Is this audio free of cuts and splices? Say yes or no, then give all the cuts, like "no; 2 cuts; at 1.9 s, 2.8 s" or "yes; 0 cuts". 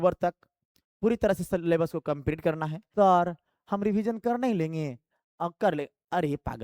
no; 1 cut; at 2.8 s